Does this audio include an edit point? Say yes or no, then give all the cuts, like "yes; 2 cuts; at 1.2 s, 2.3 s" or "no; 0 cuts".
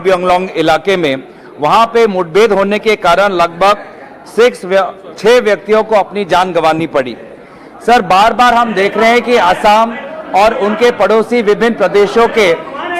yes; 1 cut; at 3.1 s